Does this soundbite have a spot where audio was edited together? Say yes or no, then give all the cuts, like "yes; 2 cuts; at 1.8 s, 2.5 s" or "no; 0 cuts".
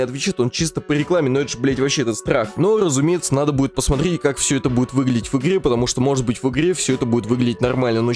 no; 0 cuts